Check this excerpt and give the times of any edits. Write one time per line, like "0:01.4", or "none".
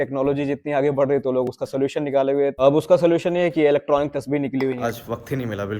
0:04.8